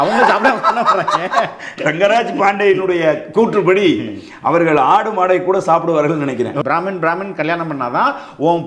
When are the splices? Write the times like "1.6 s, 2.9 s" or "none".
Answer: 6.6 s